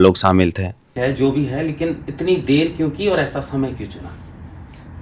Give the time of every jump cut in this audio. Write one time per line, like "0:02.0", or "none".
0:00.9